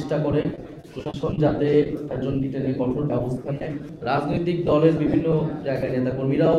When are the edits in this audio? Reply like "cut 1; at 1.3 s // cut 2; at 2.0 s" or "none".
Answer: cut 1; at 3.9 s